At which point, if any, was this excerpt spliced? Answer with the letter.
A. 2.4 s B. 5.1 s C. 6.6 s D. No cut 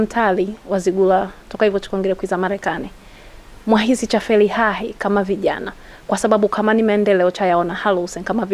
D